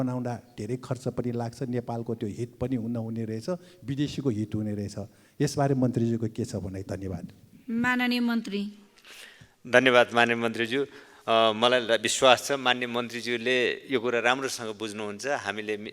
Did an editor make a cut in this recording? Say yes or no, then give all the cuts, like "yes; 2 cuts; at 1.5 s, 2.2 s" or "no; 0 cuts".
no; 0 cuts